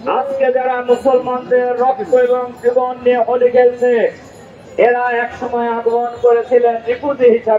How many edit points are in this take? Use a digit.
0